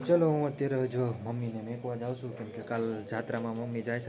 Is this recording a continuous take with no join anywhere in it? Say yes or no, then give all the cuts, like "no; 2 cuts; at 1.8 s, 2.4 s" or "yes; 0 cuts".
yes; 0 cuts